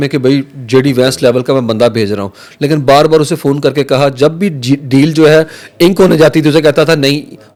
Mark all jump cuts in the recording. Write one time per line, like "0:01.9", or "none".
none